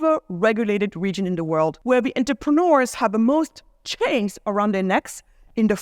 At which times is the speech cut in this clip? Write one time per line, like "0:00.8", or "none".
0:01.8